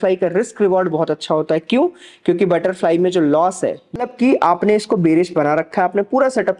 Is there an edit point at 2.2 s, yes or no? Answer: no